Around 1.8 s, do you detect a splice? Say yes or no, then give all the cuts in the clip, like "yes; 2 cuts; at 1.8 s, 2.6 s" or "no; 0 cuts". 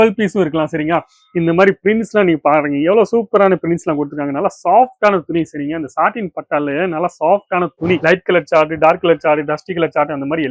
no; 1 cut; at 8.0 s